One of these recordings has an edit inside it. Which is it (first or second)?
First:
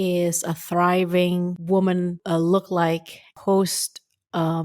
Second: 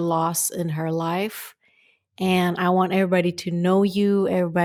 first